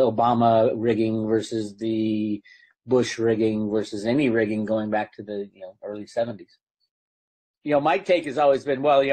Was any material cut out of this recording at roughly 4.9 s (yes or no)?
no